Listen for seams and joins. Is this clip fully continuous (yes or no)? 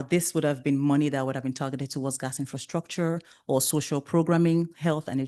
yes